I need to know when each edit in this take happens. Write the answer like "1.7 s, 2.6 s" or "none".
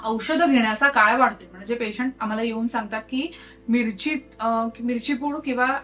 1.5 s